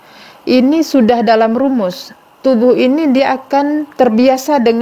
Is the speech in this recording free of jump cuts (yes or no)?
no